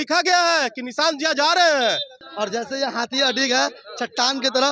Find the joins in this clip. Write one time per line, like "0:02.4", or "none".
0:02.2

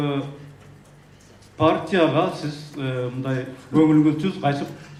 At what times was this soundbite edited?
none

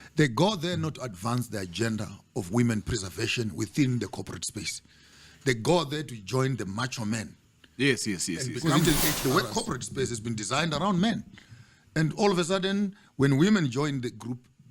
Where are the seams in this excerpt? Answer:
0:08.6

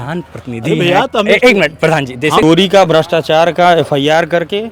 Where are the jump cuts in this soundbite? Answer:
0:02.4

